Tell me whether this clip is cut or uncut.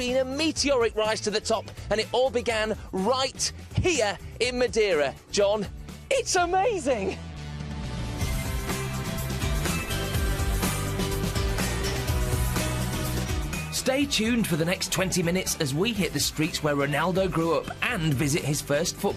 uncut